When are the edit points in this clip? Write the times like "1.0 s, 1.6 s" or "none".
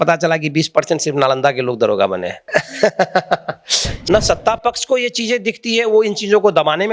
2.4 s, 3.9 s